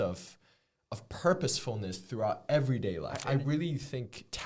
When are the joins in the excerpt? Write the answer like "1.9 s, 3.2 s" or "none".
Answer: 3.2 s